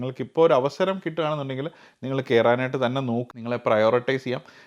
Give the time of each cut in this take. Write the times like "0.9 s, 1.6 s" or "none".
3.3 s